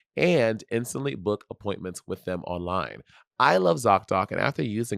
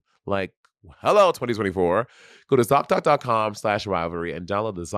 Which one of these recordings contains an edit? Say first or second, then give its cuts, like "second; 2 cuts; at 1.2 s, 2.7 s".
first; 1 cut; at 3.0 s